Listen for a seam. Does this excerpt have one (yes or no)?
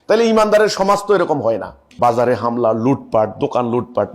yes